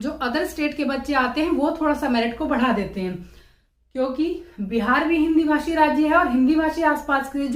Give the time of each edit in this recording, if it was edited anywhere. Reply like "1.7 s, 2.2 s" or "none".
none